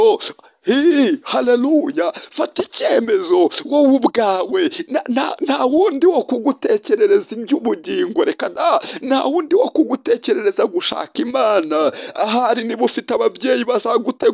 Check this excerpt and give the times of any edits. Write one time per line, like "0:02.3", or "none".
none

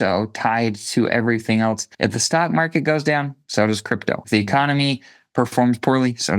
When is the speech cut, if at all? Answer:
0:01.9
0:04.2

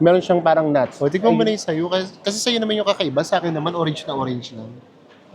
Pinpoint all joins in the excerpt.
0:00.9

